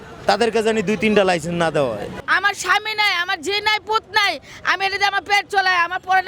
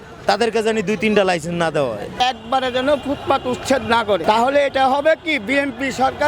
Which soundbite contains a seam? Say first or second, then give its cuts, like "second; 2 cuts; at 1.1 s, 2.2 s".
second; 2 cuts; at 2.2 s, 4.2 s